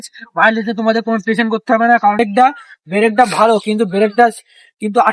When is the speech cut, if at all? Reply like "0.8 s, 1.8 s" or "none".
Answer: 2.2 s